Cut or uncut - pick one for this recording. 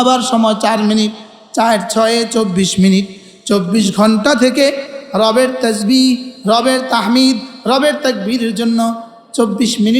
uncut